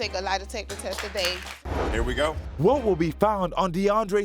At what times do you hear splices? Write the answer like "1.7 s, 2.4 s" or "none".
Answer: 2.2 s